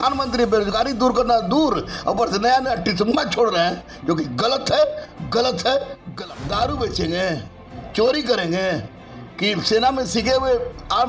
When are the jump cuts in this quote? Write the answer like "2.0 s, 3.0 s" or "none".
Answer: 6.0 s